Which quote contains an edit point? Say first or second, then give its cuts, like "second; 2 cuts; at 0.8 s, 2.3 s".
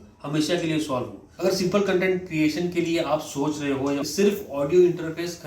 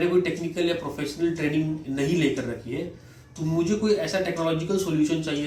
first; 2 cuts; at 1.2 s, 4.0 s